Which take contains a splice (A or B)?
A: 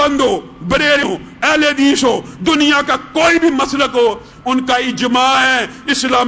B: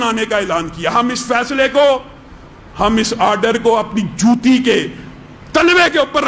A